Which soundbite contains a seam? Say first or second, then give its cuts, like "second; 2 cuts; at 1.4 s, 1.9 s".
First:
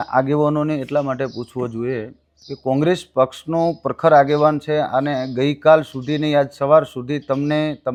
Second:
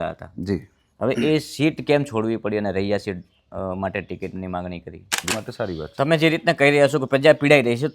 second; 1 cut; at 5.3 s